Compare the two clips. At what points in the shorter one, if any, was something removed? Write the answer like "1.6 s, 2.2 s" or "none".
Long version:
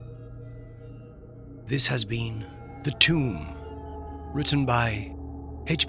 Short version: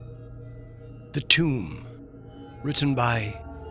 1.0 s